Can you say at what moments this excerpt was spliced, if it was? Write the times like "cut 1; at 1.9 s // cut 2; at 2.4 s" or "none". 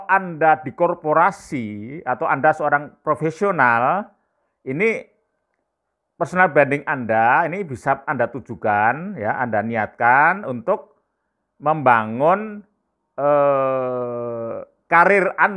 none